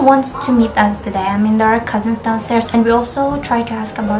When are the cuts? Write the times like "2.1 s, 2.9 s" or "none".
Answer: 2.7 s